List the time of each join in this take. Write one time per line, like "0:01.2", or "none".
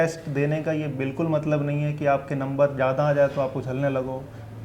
none

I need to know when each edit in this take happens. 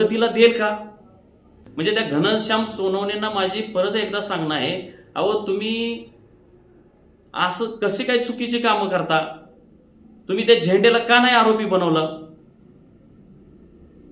0:01.6

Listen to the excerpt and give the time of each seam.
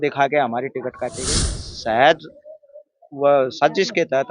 0:01.3

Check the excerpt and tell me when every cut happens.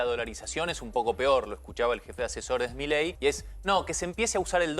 0:03.1

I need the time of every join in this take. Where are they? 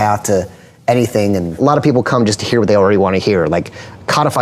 0:01.6

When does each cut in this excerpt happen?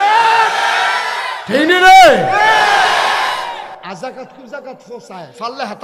0:03.8

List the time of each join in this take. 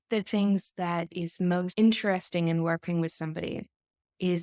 0:01.2

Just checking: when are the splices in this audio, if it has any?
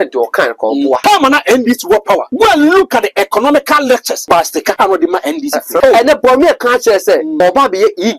0:01.0
0:02.3
0:04.5
0:05.8
0:07.4

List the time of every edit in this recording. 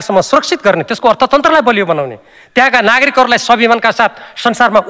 none

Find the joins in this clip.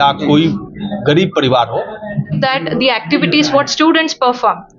0:02.4

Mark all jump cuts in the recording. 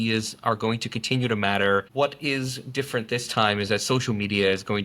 0:01.9

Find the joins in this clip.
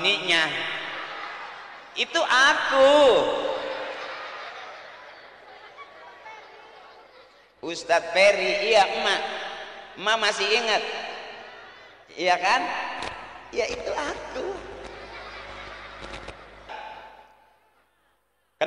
0:16.7

